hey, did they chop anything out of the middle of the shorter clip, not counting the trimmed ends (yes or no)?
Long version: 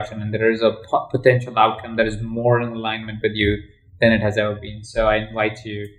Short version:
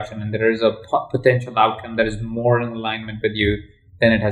no